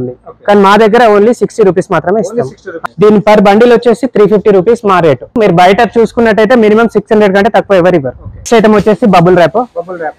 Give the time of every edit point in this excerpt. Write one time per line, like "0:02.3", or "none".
0:02.7
0:05.4
0:08.4